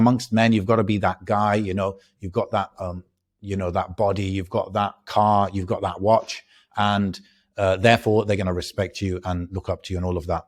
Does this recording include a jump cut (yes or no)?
no